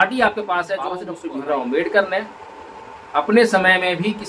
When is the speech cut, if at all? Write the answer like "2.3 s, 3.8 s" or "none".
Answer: 1.1 s